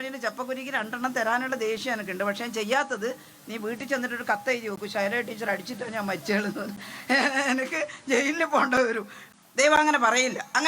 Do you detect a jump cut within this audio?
yes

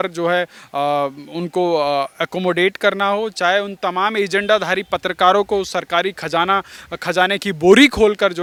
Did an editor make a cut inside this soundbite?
no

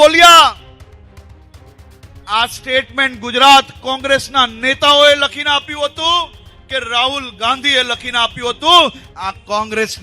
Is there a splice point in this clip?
yes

